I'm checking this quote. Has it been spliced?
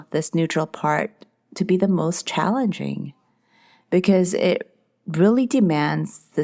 no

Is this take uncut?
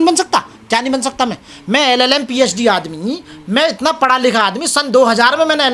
yes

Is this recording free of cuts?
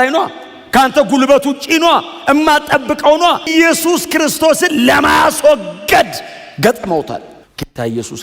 no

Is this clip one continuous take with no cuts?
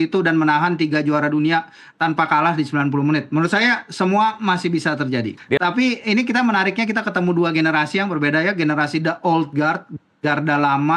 no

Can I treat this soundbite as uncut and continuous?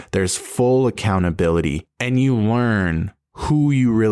no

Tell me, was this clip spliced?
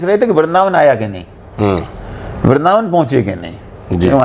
no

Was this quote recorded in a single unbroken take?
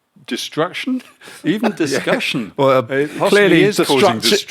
yes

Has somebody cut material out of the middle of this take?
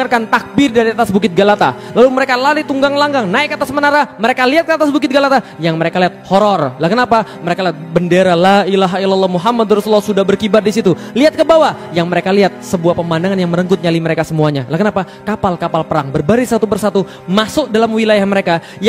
no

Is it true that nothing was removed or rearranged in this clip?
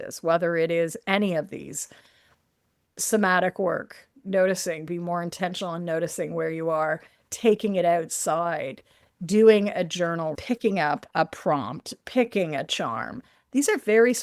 no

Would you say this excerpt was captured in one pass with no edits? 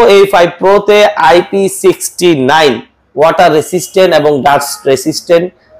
yes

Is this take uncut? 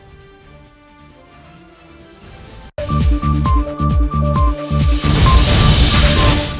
yes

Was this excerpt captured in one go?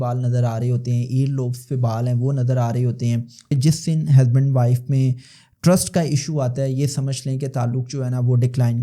no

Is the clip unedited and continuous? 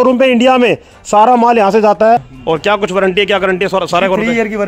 no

